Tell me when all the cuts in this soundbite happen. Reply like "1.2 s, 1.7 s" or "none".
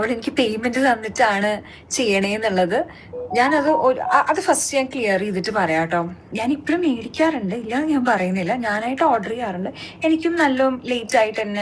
6.3 s